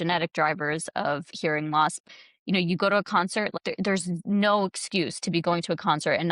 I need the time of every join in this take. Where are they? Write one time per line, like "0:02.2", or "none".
0:02.0
0:03.5

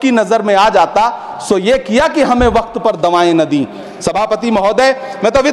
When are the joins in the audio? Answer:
none

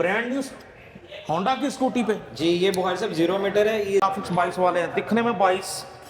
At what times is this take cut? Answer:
0:04.0

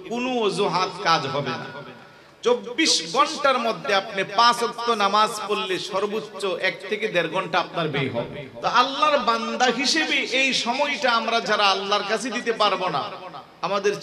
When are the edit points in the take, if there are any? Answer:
0:08.4

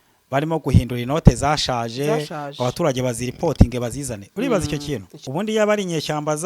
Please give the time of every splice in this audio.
0:05.1

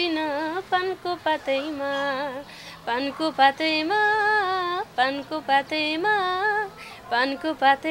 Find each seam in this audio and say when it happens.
none

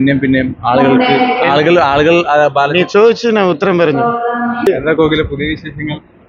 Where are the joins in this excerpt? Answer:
0:04.7

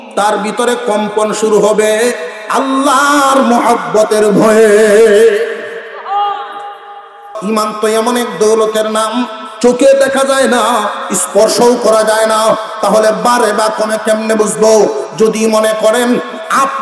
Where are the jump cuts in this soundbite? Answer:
0:07.3

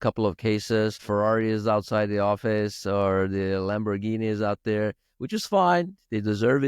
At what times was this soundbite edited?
0:01.0

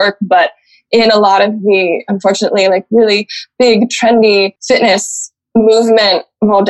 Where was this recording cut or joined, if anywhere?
0:04.6

